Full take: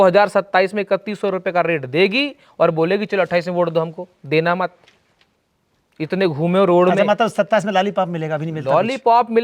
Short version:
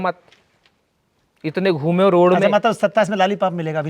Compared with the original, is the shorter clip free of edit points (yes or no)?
yes